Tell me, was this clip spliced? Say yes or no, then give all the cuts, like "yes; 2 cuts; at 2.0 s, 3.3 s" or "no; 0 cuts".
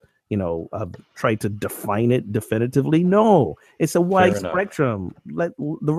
no; 0 cuts